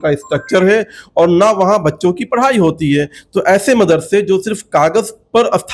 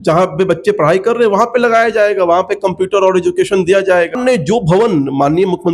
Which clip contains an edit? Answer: second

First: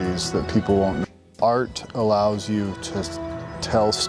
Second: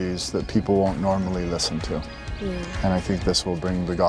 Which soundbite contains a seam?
first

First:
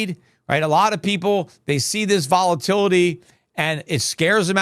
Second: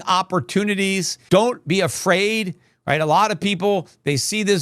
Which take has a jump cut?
second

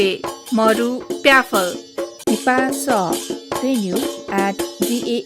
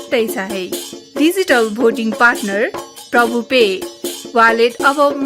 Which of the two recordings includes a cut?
first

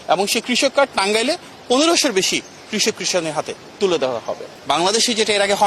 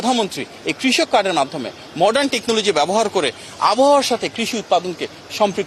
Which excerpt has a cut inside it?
first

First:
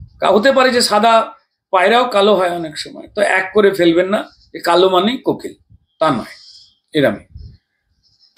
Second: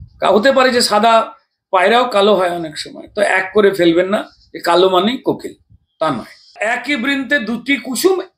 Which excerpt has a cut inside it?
second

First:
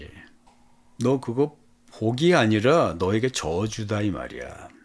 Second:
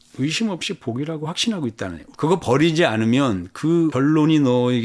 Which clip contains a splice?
second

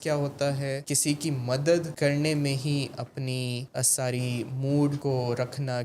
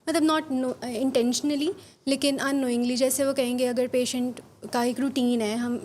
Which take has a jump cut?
first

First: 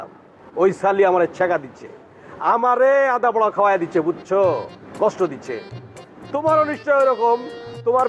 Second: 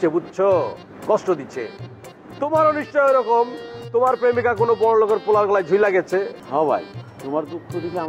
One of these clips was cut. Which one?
second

